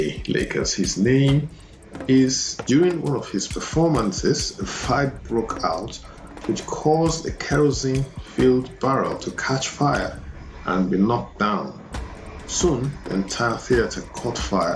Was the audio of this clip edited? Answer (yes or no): yes